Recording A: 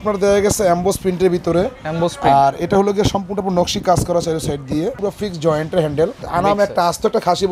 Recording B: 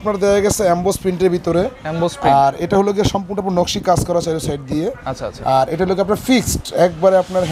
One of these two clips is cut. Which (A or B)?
A